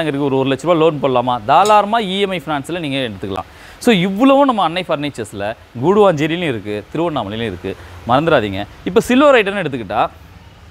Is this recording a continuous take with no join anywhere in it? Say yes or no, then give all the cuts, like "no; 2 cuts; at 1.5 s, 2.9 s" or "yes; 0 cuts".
yes; 0 cuts